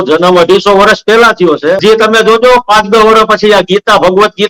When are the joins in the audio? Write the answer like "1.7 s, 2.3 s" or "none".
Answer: 1.8 s